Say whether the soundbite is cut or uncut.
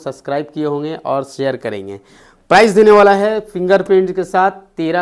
uncut